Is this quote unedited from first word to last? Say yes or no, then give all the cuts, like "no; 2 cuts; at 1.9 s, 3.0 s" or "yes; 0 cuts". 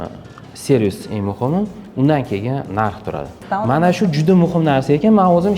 no; 1 cut; at 3.4 s